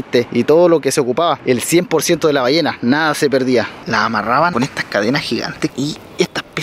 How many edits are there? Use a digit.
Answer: 1